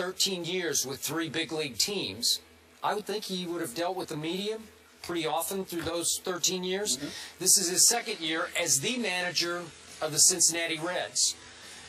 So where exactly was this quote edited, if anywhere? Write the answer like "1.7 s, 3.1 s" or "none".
none